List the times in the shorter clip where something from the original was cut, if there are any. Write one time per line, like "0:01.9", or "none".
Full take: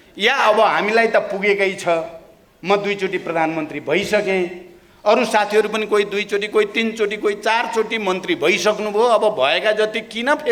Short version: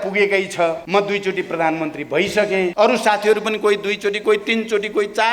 0:00.8
0:02.7